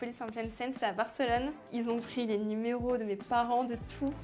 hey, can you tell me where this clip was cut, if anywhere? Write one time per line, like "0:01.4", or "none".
0:01.6